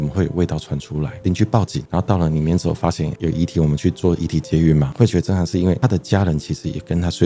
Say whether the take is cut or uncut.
cut